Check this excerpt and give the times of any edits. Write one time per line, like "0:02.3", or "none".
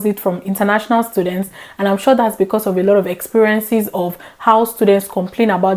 none